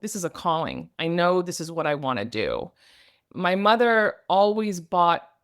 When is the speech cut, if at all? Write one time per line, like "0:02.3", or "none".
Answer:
0:03.2